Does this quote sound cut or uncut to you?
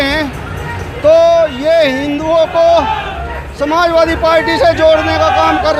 uncut